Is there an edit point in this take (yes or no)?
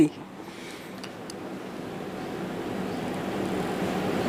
no